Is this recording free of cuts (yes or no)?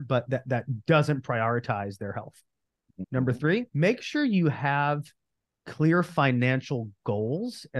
no